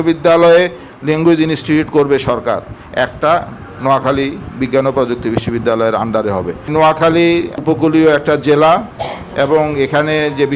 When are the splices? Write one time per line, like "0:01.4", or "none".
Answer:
0:06.7
0:07.5